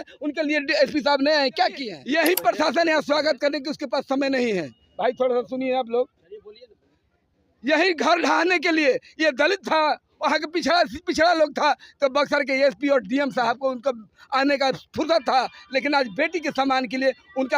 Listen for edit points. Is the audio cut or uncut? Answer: cut